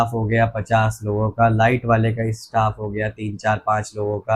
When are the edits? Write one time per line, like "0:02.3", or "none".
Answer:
none